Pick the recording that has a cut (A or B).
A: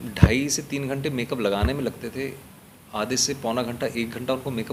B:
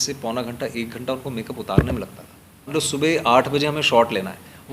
B